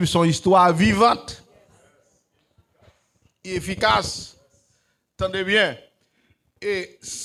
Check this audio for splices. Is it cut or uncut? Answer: uncut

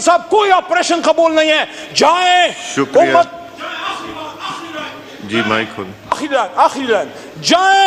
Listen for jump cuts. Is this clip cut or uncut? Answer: uncut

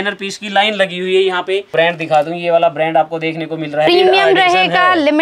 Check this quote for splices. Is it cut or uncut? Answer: cut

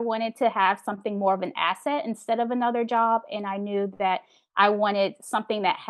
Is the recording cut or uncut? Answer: uncut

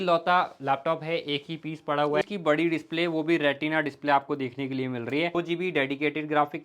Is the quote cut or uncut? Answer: cut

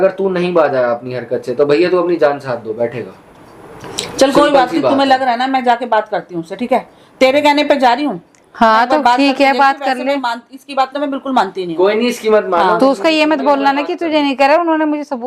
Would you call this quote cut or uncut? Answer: uncut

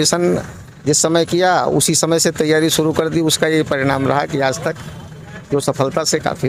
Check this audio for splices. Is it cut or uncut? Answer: uncut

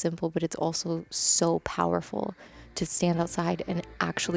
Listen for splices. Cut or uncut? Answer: uncut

